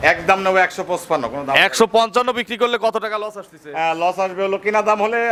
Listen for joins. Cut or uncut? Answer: uncut